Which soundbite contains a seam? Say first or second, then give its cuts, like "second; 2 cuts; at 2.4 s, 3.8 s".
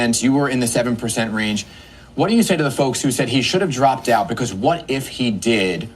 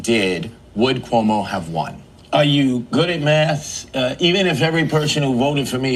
first; 1 cut; at 1.1 s